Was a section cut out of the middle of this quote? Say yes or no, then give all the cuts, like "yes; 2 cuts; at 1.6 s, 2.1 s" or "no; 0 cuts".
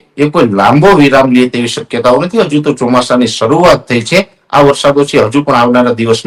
no; 0 cuts